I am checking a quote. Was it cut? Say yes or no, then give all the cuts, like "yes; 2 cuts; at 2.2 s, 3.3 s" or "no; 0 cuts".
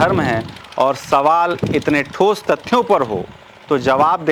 no; 0 cuts